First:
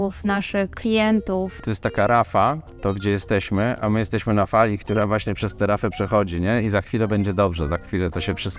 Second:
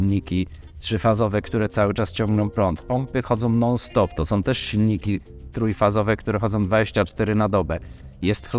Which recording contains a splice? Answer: first; 2 cuts; at 1.6 s, 2.7 s

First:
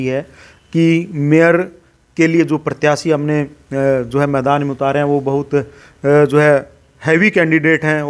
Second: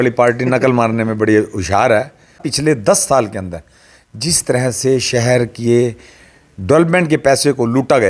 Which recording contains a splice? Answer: second; 1 cut; at 2.5 s

